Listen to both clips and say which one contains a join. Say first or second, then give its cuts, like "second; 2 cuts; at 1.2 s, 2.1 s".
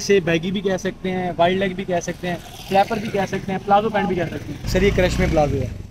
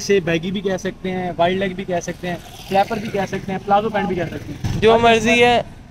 first; 1 cut; at 4.6 s